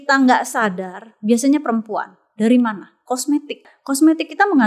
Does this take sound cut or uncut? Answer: cut